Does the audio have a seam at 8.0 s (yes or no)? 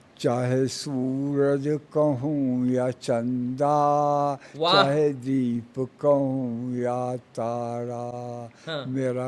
no